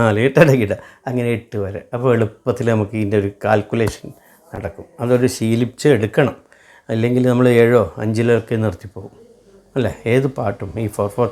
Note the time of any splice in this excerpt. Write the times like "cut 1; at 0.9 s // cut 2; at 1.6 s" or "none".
none